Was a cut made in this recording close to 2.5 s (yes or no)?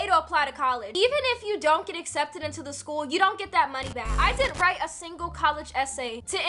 no